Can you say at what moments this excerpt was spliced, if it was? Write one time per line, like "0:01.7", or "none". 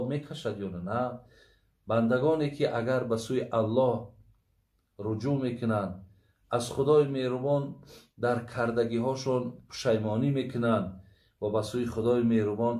none